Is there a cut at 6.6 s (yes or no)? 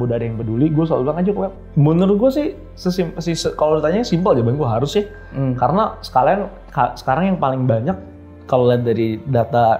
no